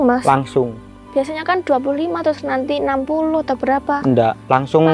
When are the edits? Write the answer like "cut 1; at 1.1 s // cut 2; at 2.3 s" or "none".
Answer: cut 1; at 0.9 s

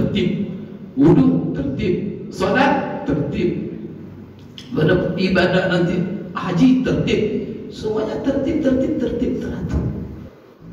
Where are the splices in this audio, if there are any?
none

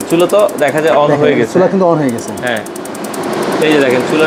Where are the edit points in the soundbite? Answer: none

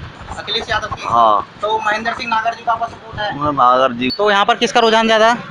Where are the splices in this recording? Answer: cut 1; at 4.1 s

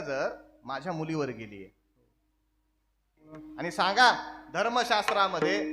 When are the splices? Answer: cut 1; at 3.3 s

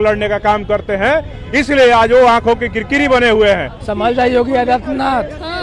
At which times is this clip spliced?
cut 1; at 3.8 s

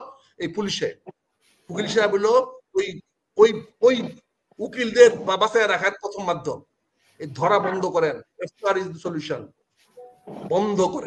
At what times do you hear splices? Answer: none

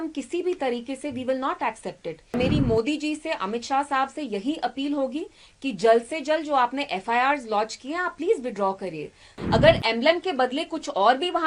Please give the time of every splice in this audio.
cut 1; at 2.3 s // cut 2; at 9.3 s

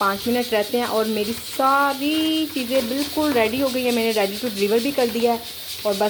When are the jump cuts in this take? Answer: none

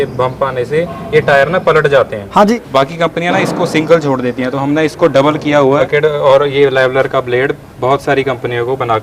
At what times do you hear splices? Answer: cut 1; at 2.5 s // cut 2; at 5.9 s

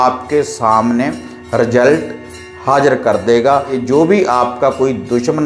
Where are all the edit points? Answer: cut 1; at 3.8 s

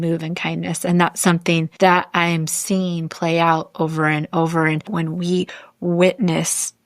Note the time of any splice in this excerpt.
cut 1; at 1.7 s // cut 2; at 4.9 s

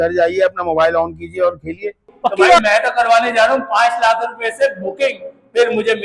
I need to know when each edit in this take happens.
cut 1; at 2.6 s

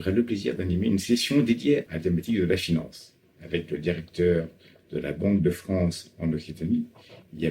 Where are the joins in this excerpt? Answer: cut 1; at 1.9 s

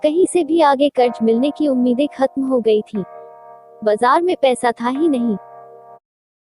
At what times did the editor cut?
cut 1; at 5.4 s

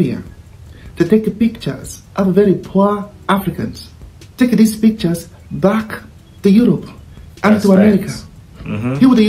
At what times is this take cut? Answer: none

